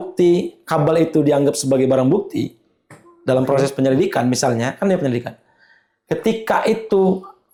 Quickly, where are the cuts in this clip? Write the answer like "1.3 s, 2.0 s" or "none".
none

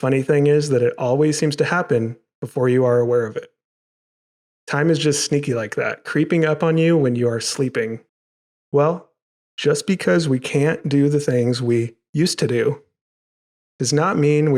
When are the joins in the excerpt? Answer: 8.1 s

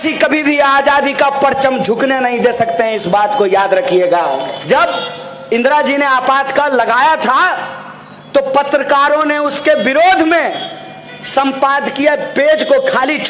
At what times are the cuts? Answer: 4.5 s

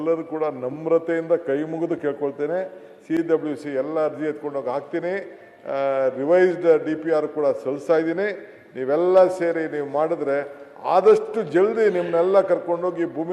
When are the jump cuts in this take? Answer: none

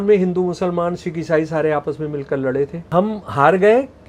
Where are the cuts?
2.8 s

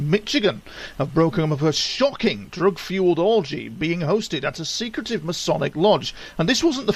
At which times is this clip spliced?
2.5 s

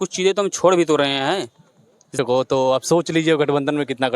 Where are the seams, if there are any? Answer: 2.1 s

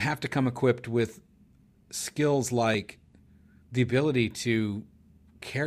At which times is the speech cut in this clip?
none

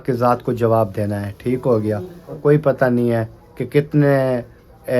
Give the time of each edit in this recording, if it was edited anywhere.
2.4 s

